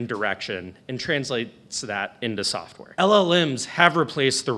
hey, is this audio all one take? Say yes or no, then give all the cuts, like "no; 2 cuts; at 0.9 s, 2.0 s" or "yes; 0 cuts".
no; 1 cut; at 2.8 s